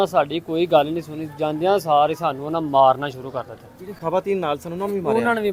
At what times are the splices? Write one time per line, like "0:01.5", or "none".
none